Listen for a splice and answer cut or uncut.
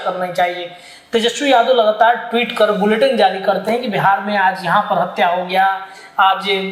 uncut